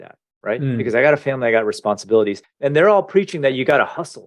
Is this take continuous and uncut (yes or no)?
no